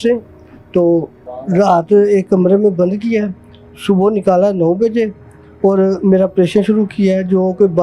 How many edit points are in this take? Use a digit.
0